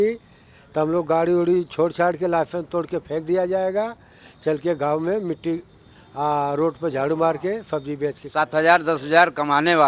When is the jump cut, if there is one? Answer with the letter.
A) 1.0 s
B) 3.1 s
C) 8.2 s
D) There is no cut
C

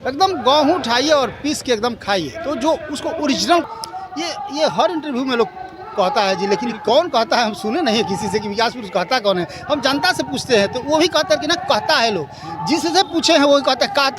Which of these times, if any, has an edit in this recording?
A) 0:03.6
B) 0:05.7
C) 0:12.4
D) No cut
A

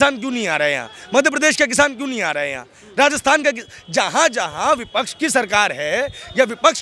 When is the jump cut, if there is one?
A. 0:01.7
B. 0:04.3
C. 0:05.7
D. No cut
D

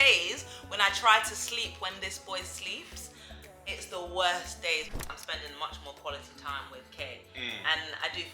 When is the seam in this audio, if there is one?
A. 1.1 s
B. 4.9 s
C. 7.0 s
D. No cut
B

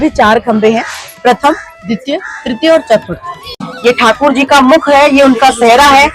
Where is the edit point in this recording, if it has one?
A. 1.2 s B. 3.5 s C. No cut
B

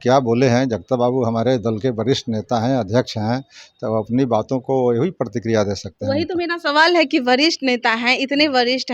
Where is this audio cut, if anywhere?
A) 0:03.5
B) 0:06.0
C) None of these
C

